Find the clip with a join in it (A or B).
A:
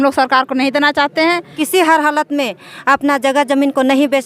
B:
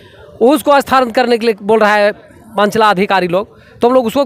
A